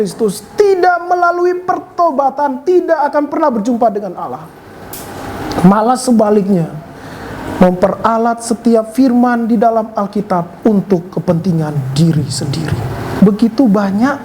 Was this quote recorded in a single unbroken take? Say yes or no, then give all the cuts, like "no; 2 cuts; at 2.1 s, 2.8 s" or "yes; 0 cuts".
no; 1 cut; at 13.1 s